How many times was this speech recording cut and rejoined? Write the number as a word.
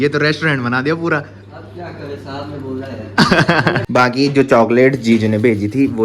one